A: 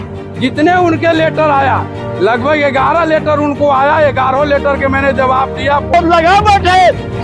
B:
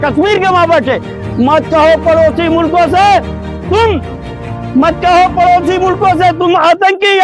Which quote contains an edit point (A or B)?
A